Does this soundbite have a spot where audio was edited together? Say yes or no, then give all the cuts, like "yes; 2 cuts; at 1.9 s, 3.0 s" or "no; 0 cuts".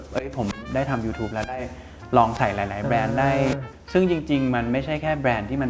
no; 0 cuts